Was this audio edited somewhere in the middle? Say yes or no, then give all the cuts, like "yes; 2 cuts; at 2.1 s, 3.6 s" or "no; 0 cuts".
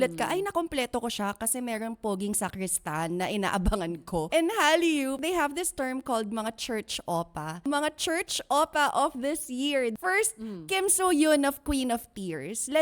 yes; 5 cuts; at 4.3 s, 5.2 s, 7.6 s, 9.9 s, 11.6 s